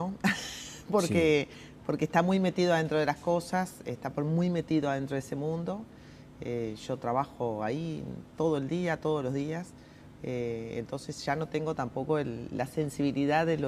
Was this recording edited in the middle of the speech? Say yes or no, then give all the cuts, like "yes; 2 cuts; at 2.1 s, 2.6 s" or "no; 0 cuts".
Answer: yes; 1 cut; at 3.2 s